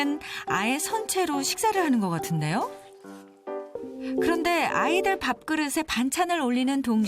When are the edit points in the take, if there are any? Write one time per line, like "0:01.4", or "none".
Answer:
0:03.8